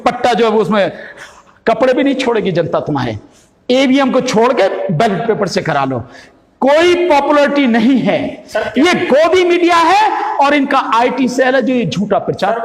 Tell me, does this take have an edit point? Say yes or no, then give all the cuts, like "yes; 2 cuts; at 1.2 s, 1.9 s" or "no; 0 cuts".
no; 0 cuts